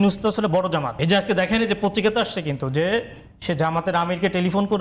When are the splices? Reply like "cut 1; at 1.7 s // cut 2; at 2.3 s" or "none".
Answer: cut 1; at 0.9 s